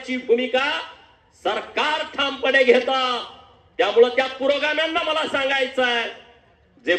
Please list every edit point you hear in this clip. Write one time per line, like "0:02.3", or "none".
none